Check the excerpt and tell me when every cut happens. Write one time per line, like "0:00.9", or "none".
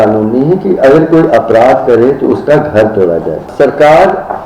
0:03.5

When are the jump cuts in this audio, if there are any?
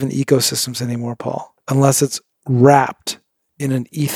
0:01.5

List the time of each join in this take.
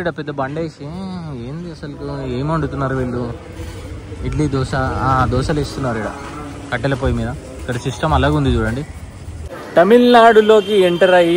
0:09.5

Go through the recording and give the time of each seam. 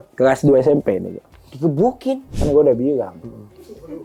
0:02.3

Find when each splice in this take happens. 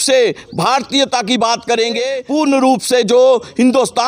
0:02.2

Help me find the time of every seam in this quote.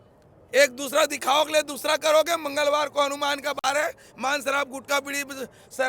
none

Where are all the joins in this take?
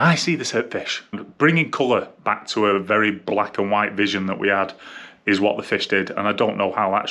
0:01.2

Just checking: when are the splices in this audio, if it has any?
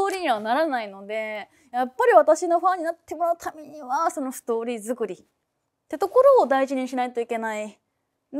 none

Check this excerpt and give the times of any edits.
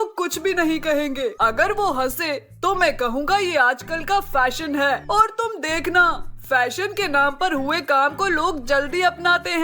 0:01.4
0:05.0

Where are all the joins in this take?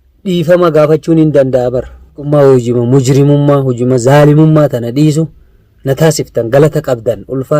0:02.1

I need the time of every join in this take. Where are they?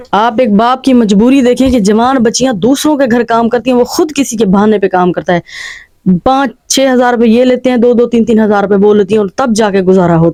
none

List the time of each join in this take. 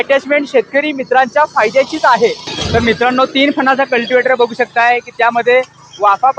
0:02.5

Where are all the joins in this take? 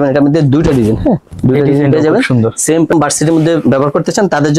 0:02.9

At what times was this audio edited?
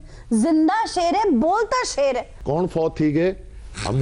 0:02.3

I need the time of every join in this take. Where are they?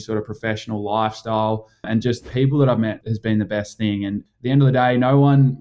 0:01.9
0:03.1
0:04.2

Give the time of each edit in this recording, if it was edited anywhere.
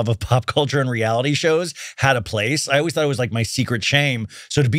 none

